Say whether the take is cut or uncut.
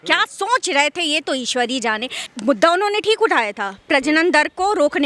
cut